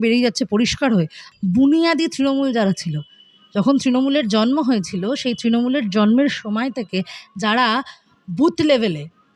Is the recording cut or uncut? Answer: cut